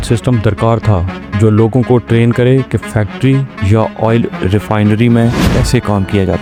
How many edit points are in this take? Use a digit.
0